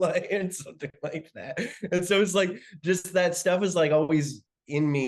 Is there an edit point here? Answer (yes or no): no